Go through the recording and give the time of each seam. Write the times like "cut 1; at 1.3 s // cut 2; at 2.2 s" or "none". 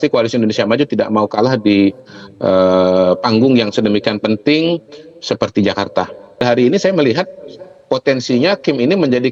cut 1; at 6.4 s